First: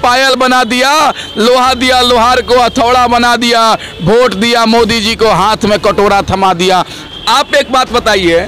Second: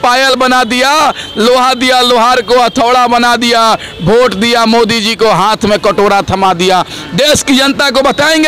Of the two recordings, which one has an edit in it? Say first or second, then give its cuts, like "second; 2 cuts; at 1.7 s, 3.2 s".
first; 1 cut; at 7.0 s